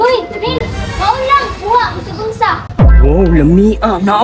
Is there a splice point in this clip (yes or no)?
yes